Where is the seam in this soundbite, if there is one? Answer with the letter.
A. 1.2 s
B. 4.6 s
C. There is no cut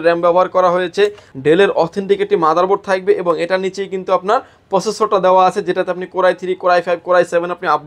A